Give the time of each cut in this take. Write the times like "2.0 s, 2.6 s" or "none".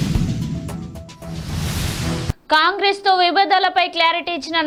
none

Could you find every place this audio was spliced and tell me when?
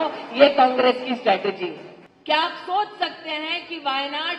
none

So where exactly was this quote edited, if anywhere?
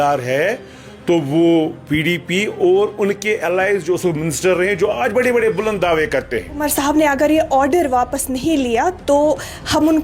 6.6 s

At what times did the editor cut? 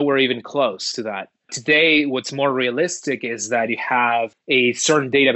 1.6 s, 4.4 s

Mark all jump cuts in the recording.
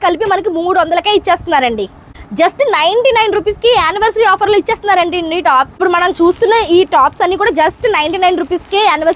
2.2 s, 5.7 s

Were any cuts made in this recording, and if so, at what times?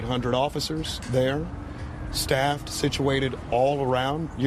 none

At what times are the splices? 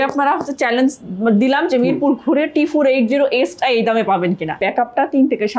4.6 s

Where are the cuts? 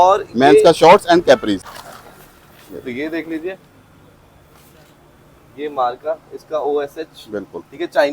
1.7 s

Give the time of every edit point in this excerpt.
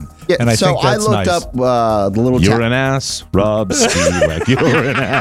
none

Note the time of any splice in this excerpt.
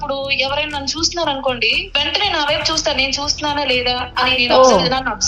1.8 s

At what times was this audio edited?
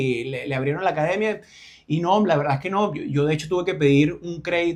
none

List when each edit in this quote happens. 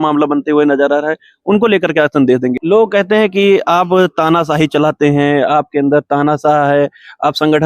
2.6 s

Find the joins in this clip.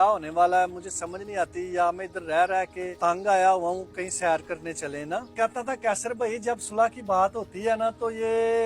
2.8 s, 5.3 s

